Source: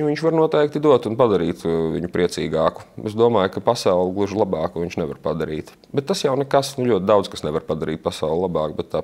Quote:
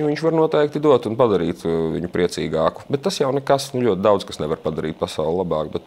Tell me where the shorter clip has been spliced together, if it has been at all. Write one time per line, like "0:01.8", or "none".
0:02.8